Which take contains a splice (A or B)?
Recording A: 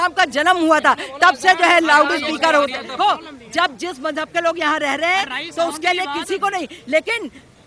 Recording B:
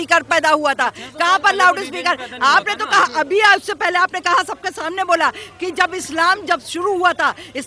A